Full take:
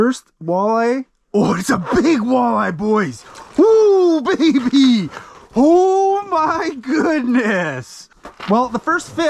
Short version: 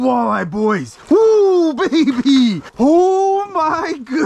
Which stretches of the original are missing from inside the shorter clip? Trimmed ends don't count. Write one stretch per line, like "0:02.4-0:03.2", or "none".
0:03.2-0:03.4
0:05.1-0:05.4